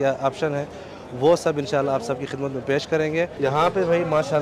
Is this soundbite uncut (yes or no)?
no